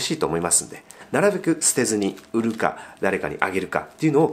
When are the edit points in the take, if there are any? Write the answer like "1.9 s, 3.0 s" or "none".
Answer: 1.0 s